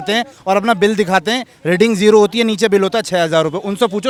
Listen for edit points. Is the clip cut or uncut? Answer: uncut